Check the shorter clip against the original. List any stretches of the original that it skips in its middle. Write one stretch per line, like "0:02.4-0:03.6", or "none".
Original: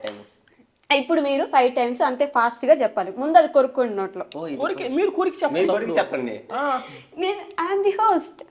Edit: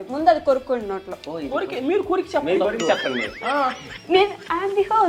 none